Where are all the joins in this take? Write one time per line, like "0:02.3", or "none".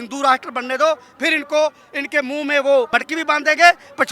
0:02.9